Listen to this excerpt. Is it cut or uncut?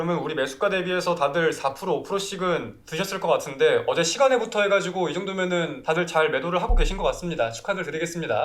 cut